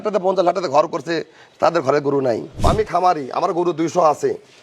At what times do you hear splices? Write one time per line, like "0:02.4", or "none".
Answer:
0:02.5